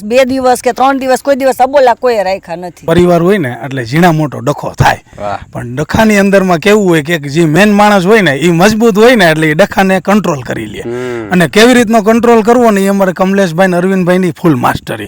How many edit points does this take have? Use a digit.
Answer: 1